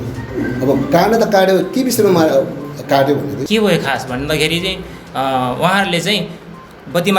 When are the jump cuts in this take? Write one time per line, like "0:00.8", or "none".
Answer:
0:03.4